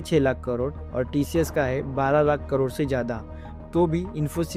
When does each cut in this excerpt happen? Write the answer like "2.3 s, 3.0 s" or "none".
none